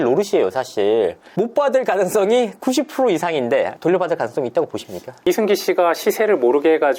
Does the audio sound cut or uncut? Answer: cut